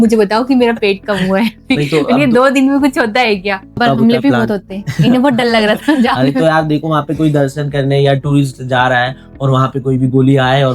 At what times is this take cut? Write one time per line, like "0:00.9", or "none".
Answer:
0:03.8